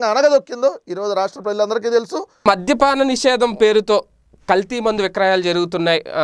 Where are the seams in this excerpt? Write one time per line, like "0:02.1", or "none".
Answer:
0:02.5